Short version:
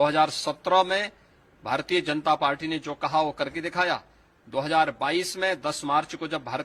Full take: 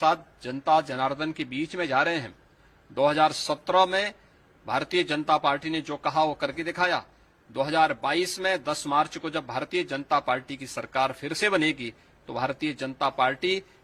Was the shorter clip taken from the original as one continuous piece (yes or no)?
yes